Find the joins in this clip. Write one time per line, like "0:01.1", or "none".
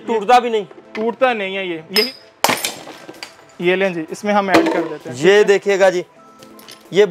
0:02.1